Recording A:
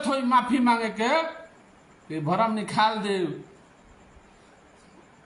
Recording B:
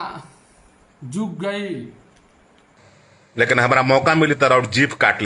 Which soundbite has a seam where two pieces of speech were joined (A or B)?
B